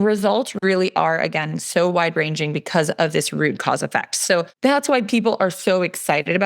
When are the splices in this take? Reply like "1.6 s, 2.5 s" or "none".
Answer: 4.5 s